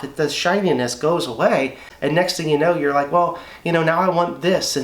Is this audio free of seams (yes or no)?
no